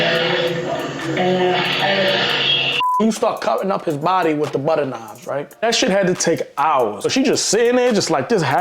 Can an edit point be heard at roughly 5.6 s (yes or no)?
yes